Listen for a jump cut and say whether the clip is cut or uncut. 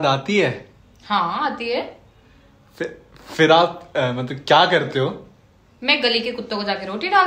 uncut